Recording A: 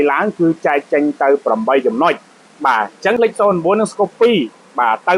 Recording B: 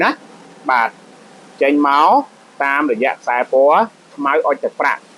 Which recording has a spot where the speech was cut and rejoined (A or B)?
A